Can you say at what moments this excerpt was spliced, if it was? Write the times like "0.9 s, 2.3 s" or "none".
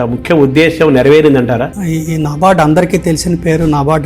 1.7 s